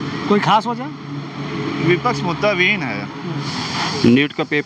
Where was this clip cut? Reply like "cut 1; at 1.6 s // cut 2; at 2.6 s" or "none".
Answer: cut 1; at 3.5 s